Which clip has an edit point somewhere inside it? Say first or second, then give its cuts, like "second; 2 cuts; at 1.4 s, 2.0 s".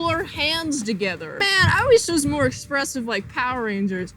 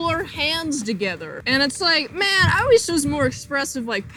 first; 1 cut; at 1.4 s